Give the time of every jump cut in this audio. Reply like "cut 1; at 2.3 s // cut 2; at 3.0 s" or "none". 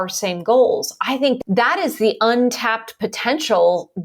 cut 1; at 1.4 s